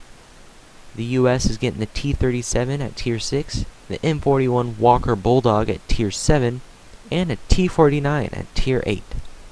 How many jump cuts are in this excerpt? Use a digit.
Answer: 1